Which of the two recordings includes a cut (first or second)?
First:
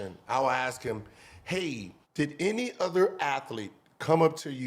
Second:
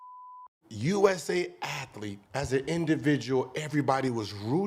first